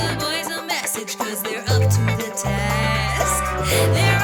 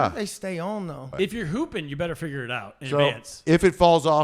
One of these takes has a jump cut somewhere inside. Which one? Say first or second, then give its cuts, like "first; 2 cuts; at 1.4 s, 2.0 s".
second; 1 cut; at 1.1 s